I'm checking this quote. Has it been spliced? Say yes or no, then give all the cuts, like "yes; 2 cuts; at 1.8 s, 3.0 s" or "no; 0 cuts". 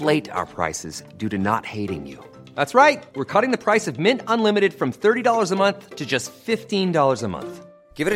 no; 0 cuts